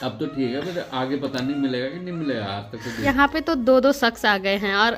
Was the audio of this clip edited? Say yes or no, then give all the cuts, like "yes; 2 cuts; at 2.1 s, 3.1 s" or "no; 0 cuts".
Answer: yes; 1 cut; at 3.0 s